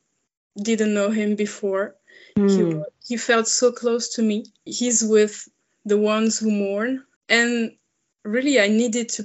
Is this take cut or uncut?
cut